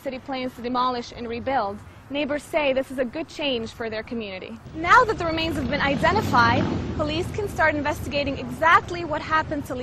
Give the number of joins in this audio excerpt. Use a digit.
1